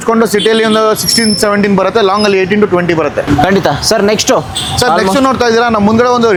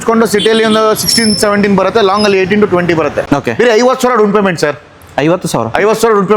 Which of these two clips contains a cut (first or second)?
second